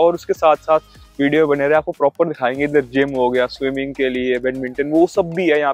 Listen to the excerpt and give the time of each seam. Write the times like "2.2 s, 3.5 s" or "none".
none